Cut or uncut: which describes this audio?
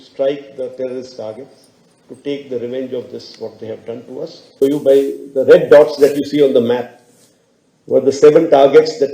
cut